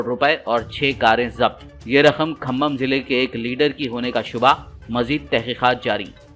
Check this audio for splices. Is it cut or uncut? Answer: uncut